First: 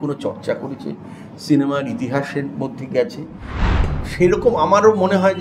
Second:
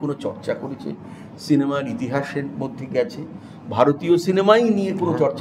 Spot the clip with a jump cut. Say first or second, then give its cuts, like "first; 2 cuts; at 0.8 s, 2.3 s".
first; 1 cut; at 3.6 s